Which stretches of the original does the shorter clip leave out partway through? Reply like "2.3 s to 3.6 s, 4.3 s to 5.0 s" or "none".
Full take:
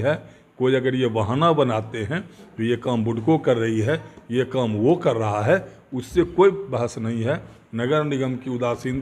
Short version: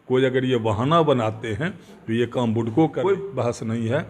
3.6 s to 6.4 s